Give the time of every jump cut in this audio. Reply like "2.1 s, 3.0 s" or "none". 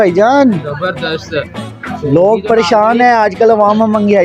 none